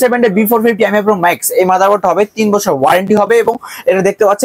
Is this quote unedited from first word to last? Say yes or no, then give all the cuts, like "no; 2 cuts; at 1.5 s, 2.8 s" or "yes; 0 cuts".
yes; 0 cuts